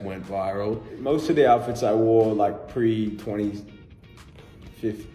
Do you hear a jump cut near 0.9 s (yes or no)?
yes